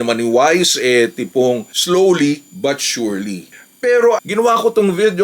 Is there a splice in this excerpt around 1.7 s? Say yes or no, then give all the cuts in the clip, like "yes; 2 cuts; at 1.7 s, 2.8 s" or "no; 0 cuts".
yes; 2 cuts; at 1.7 s, 3.5 s